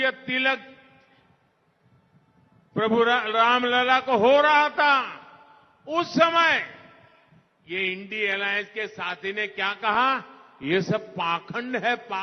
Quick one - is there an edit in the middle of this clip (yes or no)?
no